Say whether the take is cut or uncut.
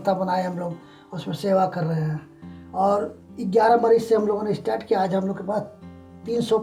uncut